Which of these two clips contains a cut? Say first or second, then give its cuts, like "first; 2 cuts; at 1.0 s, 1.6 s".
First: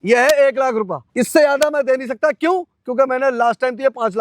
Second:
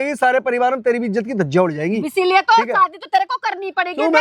first; 1 cut; at 1.0 s